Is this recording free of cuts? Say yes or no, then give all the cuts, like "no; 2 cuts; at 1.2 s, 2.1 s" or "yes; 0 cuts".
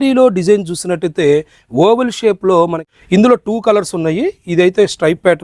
no; 1 cut; at 2.9 s